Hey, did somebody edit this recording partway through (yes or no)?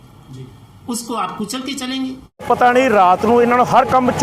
yes